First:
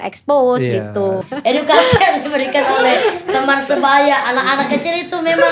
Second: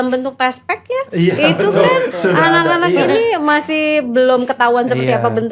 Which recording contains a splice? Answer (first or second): first